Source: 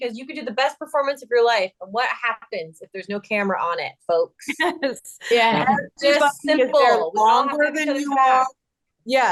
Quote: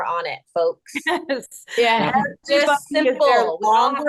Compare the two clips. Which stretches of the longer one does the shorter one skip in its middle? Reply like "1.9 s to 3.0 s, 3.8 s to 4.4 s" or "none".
none